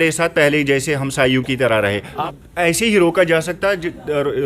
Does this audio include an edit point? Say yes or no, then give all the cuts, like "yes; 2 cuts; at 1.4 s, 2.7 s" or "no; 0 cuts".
yes; 1 cut; at 2.2 s